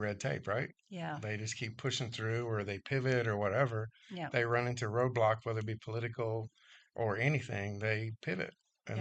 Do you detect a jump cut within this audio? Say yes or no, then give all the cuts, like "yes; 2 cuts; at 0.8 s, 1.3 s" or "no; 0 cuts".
no; 0 cuts